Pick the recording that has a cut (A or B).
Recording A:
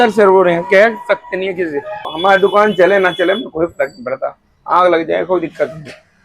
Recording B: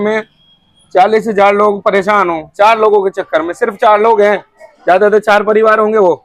A